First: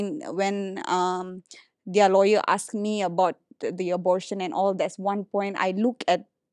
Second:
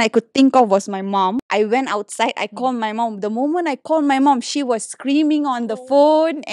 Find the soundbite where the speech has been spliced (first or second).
second